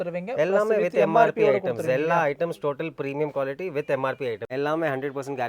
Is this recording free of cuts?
no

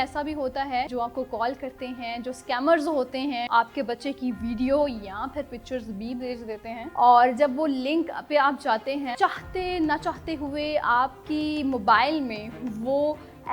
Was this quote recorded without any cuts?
no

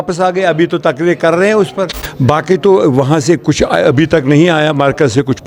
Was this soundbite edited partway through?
yes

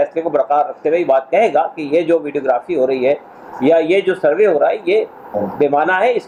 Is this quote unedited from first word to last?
yes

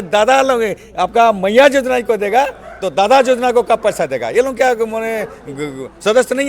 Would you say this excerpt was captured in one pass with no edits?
yes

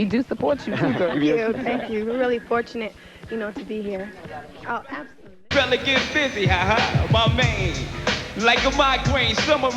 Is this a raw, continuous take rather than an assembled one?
no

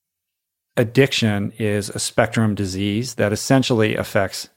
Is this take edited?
yes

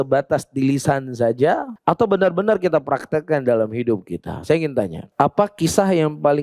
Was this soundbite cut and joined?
yes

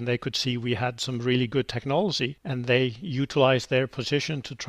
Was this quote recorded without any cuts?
yes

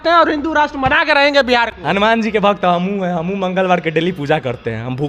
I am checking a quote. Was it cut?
no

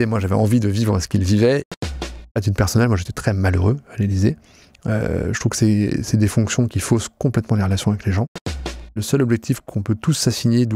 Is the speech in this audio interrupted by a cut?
yes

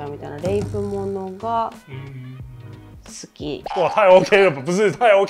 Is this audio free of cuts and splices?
no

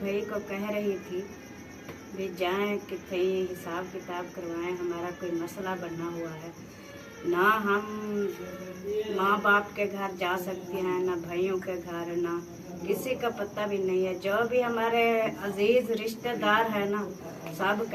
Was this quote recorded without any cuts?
yes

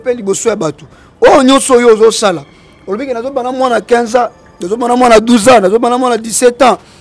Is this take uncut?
yes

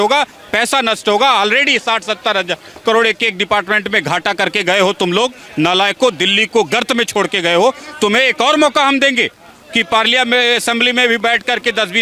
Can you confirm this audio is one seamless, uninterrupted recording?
yes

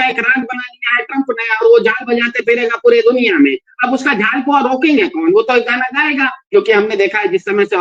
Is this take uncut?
no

